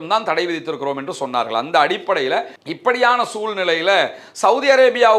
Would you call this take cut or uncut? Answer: cut